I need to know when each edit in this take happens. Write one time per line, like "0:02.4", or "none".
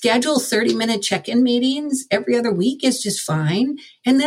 none